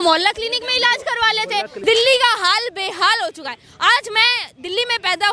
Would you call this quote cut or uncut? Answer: cut